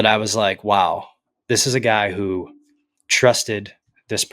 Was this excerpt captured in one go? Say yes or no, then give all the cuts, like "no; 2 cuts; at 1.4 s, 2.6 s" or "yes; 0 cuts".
yes; 0 cuts